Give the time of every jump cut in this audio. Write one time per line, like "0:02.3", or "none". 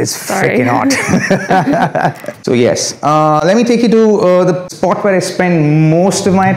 none